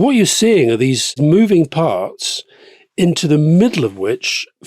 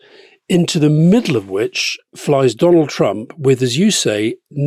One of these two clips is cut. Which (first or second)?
first